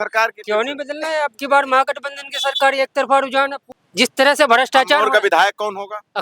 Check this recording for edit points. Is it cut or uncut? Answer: cut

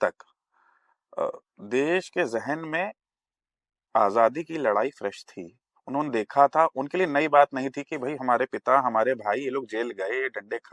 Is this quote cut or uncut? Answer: uncut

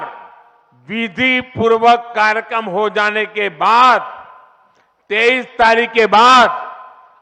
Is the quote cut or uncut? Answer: uncut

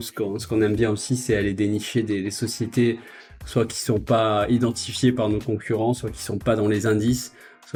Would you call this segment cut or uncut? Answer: uncut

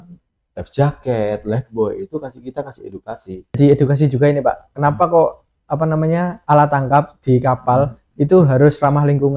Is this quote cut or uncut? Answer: cut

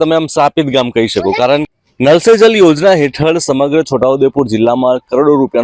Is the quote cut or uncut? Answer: cut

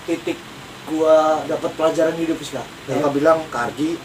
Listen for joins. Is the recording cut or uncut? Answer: cut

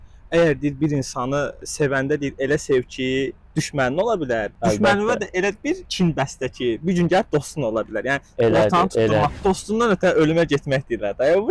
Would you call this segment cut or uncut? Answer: cut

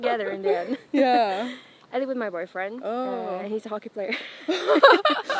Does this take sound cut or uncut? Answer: cut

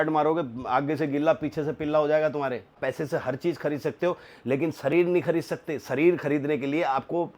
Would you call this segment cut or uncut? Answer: cut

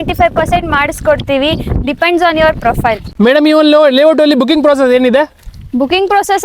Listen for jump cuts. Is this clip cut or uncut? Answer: uncut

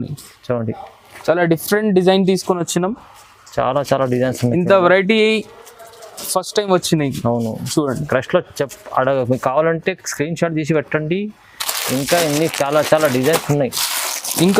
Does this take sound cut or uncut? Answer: uncut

